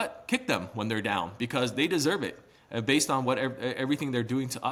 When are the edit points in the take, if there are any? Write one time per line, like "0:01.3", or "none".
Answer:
none

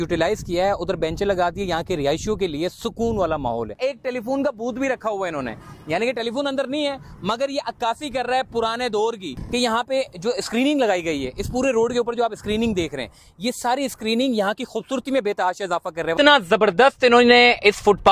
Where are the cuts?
0:03.8
0:09.3
0:16.1

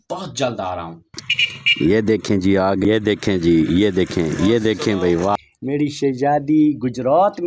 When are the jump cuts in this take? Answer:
0:01.1
0:02.8
0:05.3

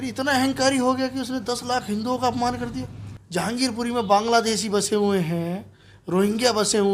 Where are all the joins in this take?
none

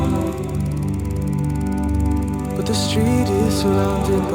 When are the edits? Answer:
none

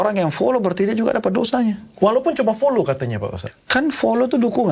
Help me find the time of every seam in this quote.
none

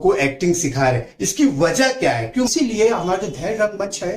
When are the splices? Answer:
0:02.5

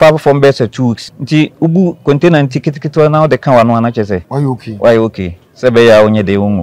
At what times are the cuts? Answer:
0:01.1
0:04.3

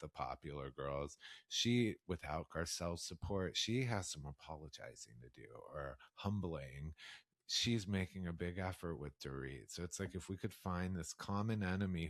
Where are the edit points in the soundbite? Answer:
none

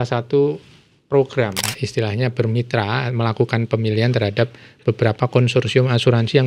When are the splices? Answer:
0:01.7

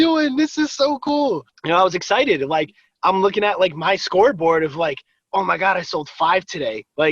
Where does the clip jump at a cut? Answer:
none

